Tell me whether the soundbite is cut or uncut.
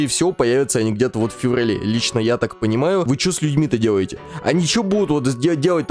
cut